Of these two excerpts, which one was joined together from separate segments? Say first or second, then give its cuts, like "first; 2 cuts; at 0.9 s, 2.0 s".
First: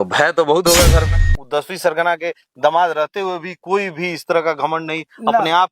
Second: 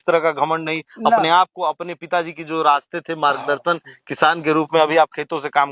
first; 1 cut; at 1.3 s